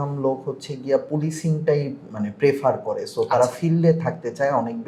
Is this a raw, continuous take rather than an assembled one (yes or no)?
yes